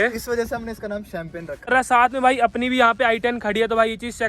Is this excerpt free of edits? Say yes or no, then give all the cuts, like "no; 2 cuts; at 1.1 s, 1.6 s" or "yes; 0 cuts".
no; 1 cut; at 1.7 s